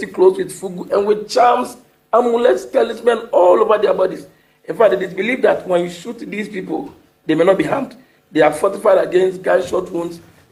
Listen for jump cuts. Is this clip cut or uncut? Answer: uncut